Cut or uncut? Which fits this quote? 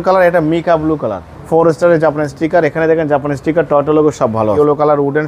cut